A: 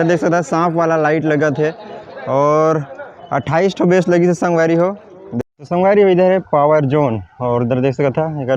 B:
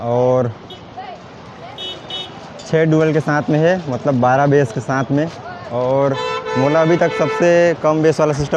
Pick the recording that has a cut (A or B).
A